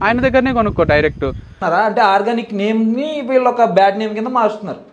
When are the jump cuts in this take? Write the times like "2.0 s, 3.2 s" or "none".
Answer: 1.6 s